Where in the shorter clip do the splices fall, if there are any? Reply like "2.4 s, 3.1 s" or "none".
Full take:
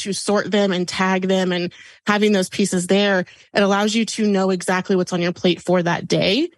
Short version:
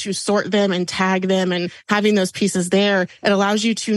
1.8 s, 3.1 s